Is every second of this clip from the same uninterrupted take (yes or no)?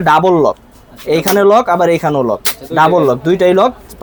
yes